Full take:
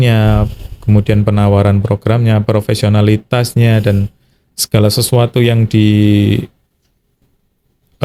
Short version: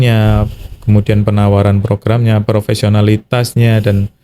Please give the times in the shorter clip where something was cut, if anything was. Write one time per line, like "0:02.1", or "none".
none